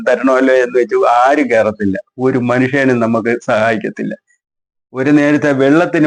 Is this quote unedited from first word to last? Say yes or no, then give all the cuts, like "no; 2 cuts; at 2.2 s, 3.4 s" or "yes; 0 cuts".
yes; 0 cuts